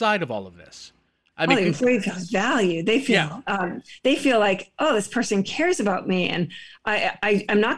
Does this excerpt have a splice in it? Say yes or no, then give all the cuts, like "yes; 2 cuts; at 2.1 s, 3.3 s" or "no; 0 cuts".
no; 0 cuts